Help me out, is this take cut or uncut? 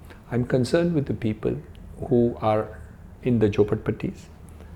uncut